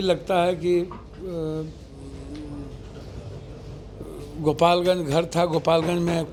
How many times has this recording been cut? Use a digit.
0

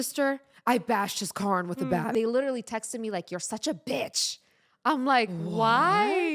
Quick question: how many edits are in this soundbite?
1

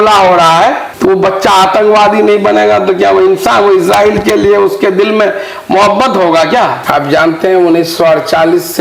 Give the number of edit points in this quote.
1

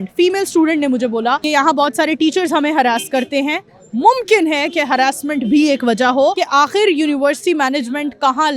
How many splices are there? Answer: 2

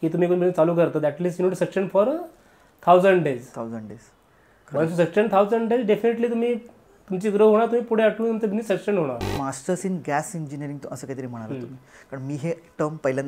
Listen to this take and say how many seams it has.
1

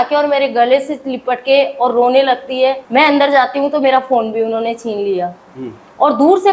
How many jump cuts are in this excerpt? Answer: 1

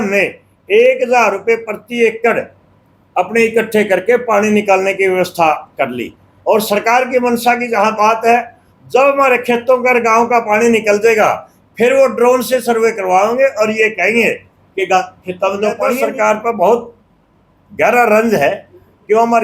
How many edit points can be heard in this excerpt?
1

